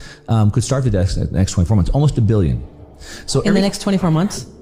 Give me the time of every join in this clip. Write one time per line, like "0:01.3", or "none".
none